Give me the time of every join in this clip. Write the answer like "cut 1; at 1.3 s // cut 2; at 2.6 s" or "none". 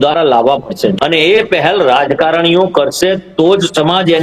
cut 1; at 0.9 s